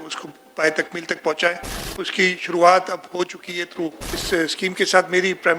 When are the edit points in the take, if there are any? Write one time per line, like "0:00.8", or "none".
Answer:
0:04.1